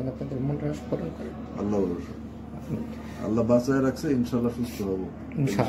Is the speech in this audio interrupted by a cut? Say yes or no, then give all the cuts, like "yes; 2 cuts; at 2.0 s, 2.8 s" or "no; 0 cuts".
no; 0 cuts